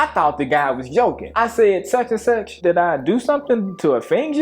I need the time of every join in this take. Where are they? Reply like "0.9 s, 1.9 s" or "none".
1.3 s, 2.6 s